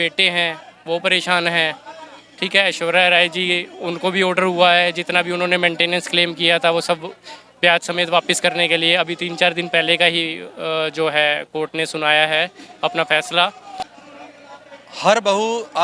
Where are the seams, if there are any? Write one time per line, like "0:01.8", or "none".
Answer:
0:13.9

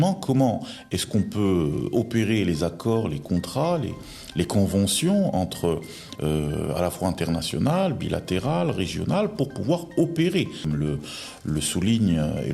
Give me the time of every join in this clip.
0:10.7

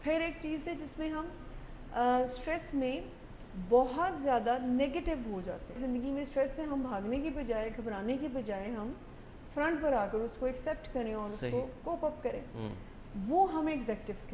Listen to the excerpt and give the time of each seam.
0:05.7

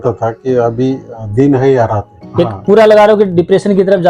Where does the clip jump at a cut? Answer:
0:02.2

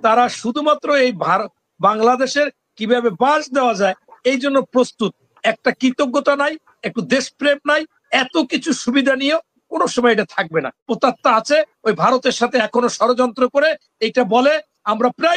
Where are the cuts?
0:10.8

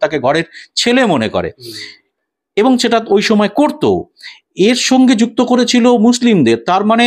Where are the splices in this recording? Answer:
none

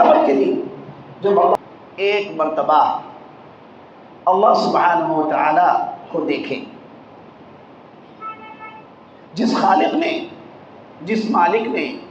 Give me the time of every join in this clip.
0:01.6

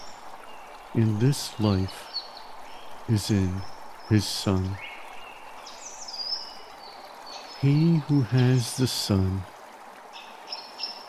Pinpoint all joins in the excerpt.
0:00.9
0:04.7
0:07.6

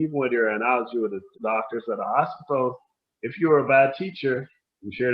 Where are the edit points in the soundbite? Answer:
0:01.4

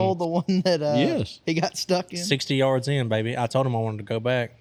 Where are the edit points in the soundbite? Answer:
none

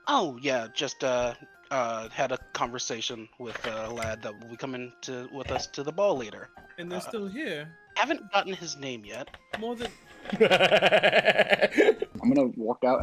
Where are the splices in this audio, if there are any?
0:12.1

